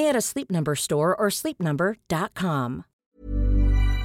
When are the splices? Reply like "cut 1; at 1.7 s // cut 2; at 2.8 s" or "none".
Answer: cut 1; at 2.9 s